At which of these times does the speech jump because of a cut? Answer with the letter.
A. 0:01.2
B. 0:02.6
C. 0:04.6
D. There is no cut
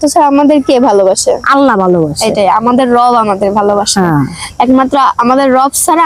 D